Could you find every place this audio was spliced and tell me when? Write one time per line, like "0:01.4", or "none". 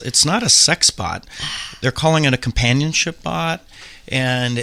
none